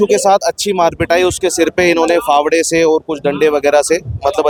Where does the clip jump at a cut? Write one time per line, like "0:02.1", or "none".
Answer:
none

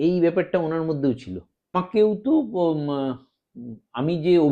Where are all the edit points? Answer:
0:01.8

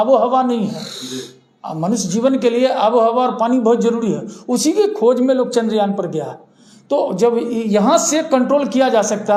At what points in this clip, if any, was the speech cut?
none

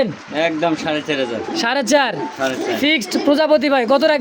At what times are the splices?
none

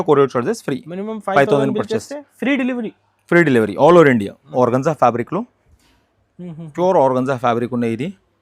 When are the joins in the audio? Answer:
0:04.5

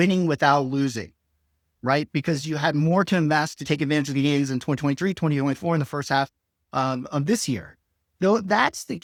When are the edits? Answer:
none

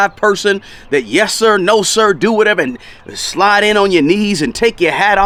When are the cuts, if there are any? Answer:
none

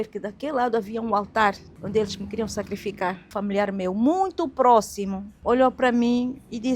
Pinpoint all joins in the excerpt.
0:01.7
0:03.3
0:05.3

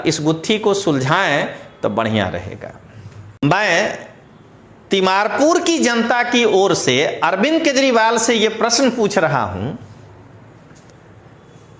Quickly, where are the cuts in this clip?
0:03.4

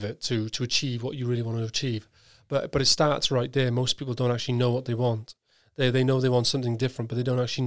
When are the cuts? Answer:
none

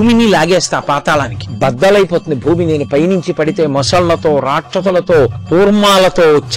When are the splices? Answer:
0:01.4
0:05.4

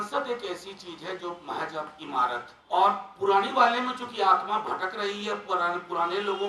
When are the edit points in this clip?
0:02.5

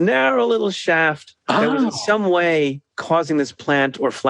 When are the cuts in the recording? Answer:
0:01.3
0:02.9

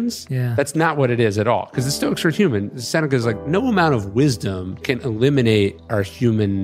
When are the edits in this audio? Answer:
0:04.8
0:05.8

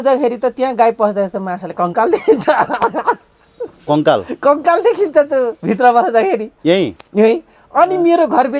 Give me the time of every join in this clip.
none

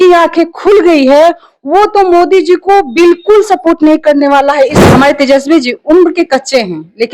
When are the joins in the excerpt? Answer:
0:04.8

